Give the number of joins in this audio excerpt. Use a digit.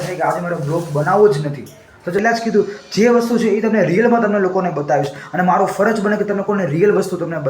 1